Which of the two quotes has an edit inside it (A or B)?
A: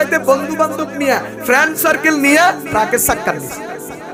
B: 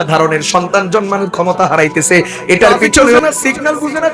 B